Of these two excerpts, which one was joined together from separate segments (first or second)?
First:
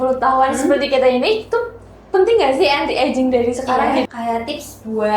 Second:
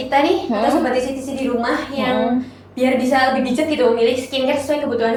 first